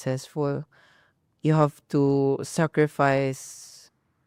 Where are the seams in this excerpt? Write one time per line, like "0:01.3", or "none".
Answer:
none